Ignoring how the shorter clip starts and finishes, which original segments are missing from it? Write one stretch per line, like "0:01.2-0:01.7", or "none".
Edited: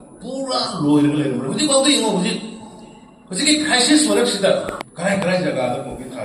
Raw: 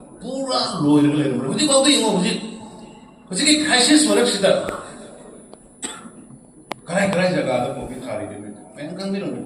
0:04.8-0:06.7